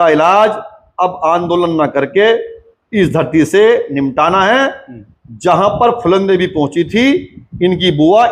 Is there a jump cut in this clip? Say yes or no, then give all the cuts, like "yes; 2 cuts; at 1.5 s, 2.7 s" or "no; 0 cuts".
no; 0 cuts